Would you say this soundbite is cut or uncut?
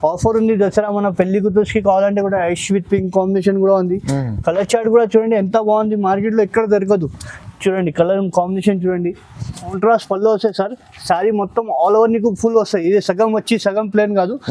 cut